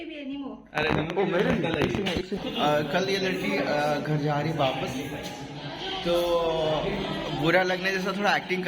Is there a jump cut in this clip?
yes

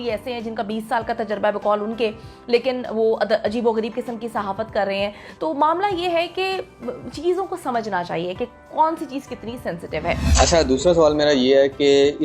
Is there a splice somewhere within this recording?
no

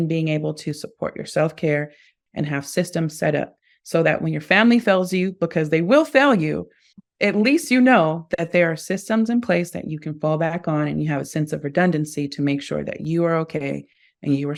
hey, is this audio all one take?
yes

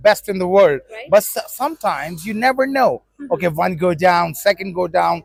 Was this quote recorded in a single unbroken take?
yes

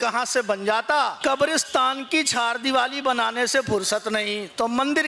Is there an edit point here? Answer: yes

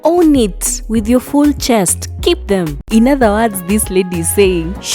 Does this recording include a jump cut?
yes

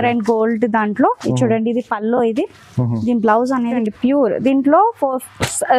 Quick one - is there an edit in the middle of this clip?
yes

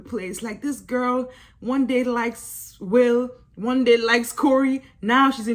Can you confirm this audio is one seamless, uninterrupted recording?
yes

